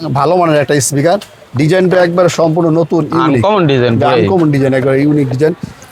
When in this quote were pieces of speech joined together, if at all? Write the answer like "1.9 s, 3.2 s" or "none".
none